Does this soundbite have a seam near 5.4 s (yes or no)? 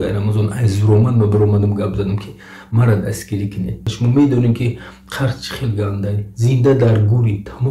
no